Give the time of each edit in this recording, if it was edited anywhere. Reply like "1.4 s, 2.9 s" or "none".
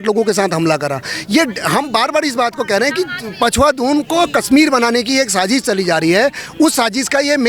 none